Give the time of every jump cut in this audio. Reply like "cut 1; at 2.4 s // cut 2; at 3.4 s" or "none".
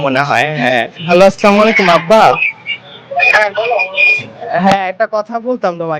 cut 1; at 1.0 s